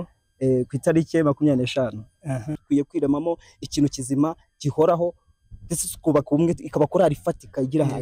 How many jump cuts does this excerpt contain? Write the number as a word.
one